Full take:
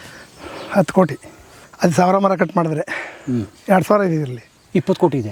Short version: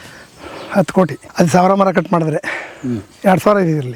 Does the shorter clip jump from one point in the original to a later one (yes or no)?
yes